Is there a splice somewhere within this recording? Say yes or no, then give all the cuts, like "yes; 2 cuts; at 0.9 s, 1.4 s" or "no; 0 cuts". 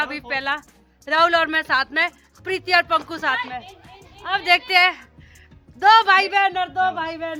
no; 0 cuts